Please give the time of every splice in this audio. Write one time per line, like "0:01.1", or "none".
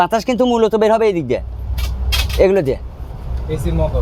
none